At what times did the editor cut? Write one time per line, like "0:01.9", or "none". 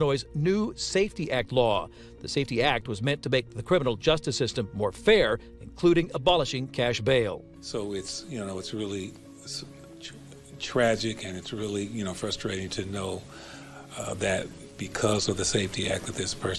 none